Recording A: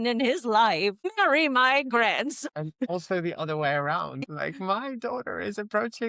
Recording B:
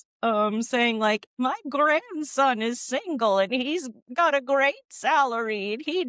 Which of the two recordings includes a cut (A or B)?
A